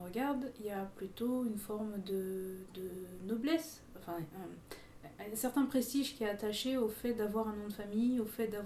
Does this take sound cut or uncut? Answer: uncut